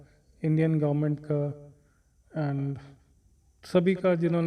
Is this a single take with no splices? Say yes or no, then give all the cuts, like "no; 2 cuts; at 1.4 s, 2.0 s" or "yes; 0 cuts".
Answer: yes; 0 cuts